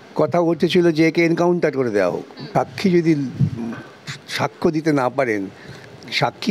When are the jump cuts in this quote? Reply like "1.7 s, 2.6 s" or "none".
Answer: 2.3 s